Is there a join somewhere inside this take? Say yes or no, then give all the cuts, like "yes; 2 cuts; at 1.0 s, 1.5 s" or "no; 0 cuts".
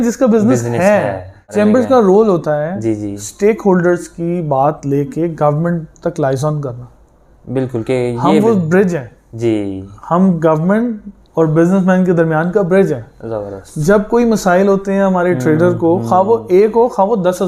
yes; 1 cut; at 1.4 s